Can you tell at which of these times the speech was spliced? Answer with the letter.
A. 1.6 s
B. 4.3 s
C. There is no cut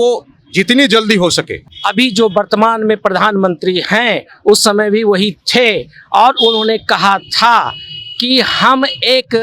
A